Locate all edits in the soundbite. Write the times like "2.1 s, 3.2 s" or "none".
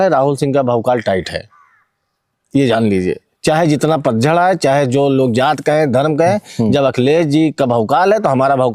none